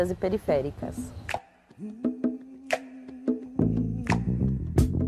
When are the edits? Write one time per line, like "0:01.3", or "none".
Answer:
none